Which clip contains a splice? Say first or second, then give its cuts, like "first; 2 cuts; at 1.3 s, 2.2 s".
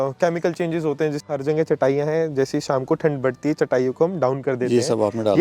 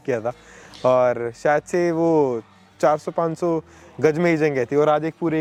first; 1 cut; at 1.2 s